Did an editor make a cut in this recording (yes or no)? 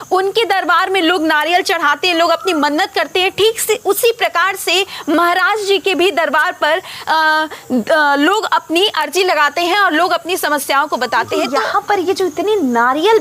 yes